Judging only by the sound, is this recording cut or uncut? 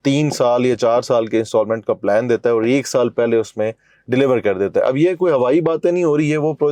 uncut